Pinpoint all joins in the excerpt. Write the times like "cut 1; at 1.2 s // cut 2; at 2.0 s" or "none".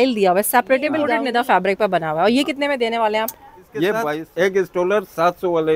cut 1; at 1.1 s // cut 2; at 4.2 s